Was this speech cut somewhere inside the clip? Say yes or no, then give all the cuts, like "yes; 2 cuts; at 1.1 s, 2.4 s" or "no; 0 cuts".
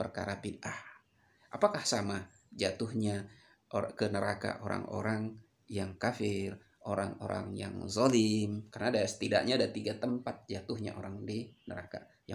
yes; 1 cut; at 8.6 s